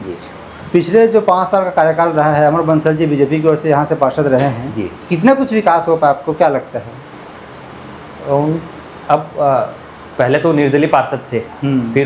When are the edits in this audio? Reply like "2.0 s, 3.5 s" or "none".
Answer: none